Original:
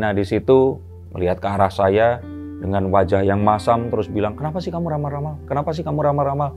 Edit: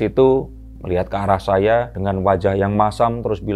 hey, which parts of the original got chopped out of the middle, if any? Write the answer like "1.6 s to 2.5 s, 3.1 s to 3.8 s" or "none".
2.3 s to 2.6 s